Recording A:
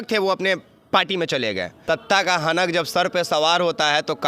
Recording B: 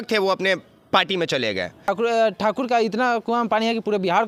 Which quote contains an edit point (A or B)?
A